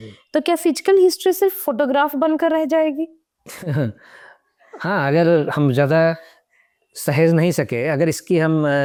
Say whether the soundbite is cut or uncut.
uncut